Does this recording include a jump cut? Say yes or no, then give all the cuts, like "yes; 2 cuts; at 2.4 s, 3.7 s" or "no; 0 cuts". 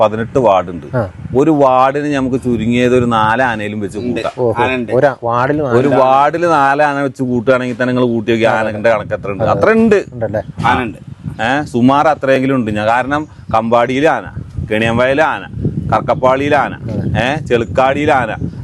no; 0 cuts